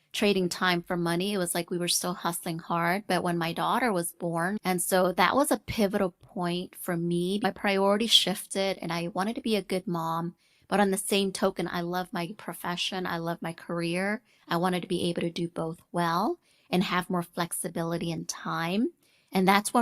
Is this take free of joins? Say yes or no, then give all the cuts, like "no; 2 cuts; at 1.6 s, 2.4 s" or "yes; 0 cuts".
no; 2 cuts; at 4.6 s, 7.4 s